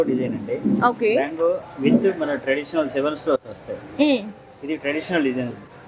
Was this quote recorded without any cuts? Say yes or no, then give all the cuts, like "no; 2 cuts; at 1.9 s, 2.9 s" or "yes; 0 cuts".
yes; 0 cuts